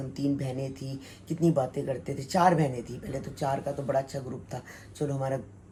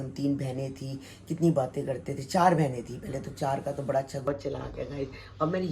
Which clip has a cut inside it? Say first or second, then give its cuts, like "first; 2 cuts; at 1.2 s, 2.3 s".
second; 1 cut; at 4.3 s